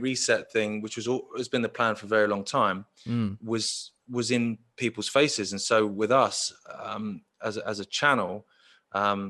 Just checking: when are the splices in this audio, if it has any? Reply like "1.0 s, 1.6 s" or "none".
none